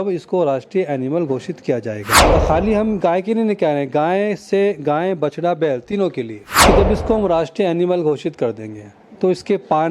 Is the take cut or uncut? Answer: cut